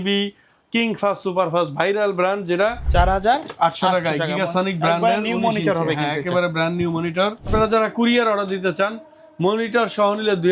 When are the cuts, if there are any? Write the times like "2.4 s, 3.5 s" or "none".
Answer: 2.8 s, 7.5 s